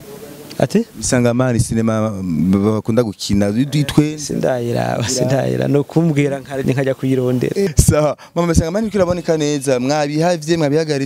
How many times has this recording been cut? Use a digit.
1